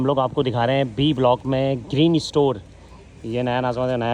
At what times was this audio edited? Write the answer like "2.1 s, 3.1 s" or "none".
none